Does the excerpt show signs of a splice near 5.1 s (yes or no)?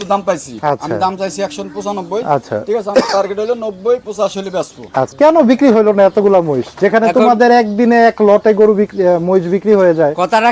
yes